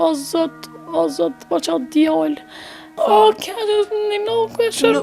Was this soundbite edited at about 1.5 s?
no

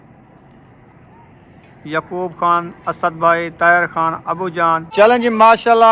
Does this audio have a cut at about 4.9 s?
yes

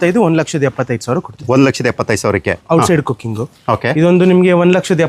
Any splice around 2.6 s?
yes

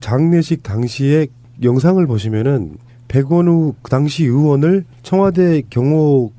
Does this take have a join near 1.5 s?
no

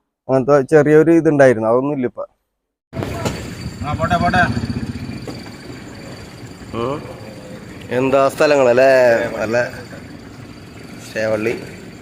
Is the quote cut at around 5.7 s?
no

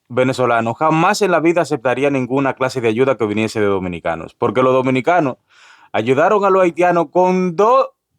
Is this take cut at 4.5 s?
yes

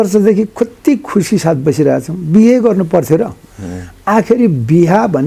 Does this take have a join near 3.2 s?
no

